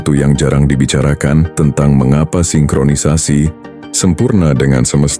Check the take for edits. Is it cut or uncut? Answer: cut